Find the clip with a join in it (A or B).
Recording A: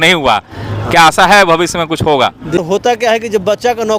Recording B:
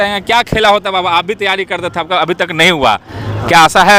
A